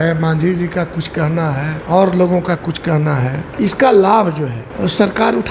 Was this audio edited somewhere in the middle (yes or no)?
yes